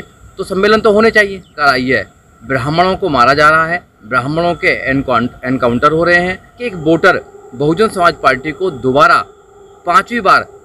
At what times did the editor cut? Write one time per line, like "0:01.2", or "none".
0:01.6
0:06.7